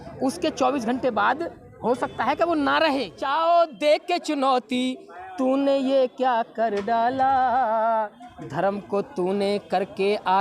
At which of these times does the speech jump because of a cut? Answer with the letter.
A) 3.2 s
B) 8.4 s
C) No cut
A